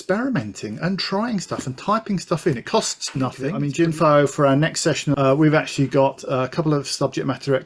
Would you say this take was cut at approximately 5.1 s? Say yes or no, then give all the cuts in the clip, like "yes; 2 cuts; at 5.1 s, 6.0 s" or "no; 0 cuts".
yes; 2 cuts; at 3.6 s, 5.1 s